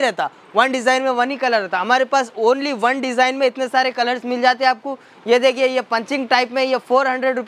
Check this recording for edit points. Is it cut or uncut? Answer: uncut